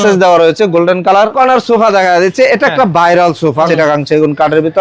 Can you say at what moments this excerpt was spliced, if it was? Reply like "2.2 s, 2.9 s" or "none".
1.3 s, 3.7 s

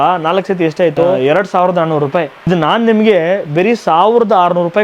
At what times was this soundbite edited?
1.2 s, 2.5 s

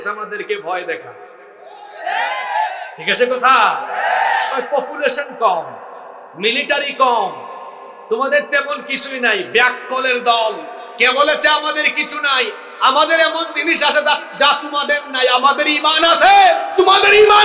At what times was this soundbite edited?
none

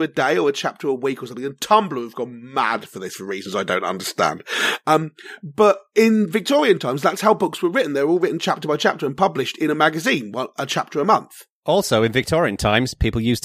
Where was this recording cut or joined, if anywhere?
11.7 s

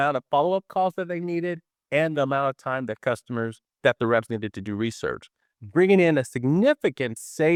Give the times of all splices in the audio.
none

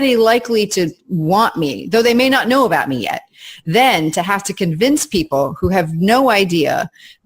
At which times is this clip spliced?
none

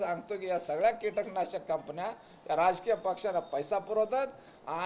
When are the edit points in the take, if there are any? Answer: none

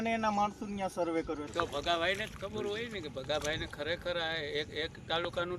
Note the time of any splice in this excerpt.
1.5 s

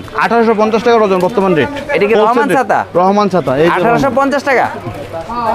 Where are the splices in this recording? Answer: none

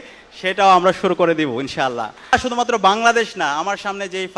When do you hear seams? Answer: 2.3 s

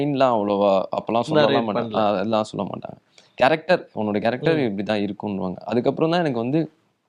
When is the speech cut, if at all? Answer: none

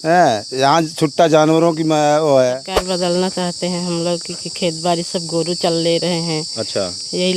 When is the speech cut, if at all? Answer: 2.7 s

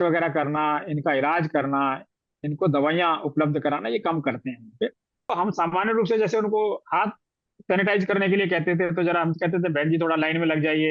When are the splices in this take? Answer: 5.3 s

